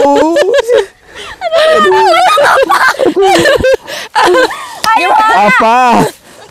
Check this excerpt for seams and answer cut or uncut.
uncut